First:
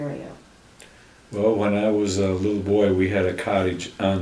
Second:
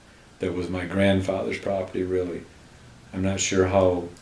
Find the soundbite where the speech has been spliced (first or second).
first